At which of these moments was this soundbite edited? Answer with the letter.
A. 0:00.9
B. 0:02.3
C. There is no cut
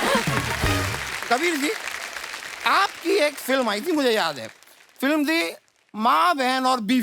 C